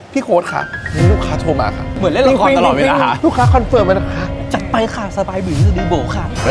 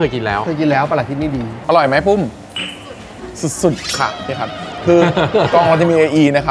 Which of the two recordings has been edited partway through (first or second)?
second